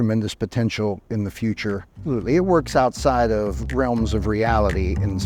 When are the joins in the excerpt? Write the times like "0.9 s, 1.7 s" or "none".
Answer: 2.1 s